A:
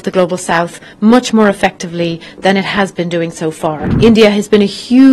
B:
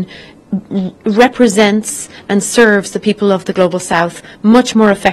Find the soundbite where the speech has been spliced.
A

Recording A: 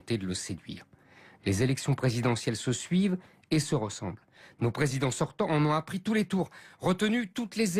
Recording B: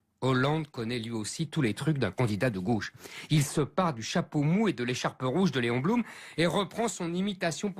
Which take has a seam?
B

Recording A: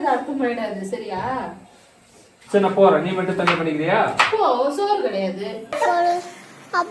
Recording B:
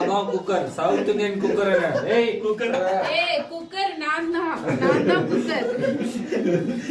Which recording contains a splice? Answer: A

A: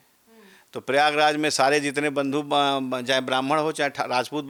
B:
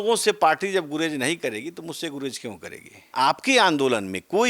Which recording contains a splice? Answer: B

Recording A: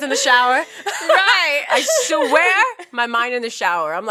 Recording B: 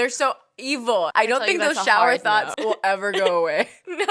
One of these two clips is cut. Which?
B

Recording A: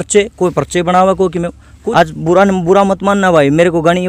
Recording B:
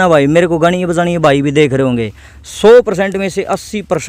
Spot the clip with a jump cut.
A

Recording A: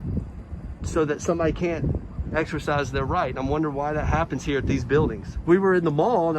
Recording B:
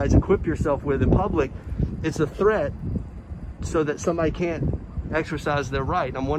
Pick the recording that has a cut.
A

